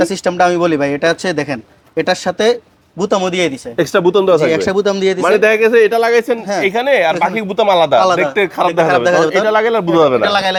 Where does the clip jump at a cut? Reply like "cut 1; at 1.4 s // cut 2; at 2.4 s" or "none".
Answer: none